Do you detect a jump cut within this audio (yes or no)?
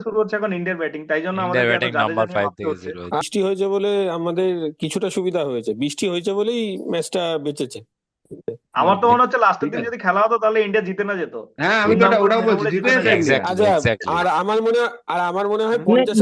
yes